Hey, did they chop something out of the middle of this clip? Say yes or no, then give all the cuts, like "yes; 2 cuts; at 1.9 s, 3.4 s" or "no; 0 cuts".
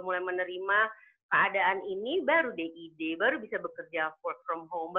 no; 0 cuts